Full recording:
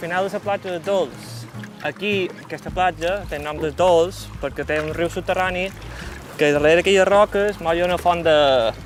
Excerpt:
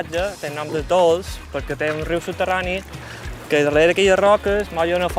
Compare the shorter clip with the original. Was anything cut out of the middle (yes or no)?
no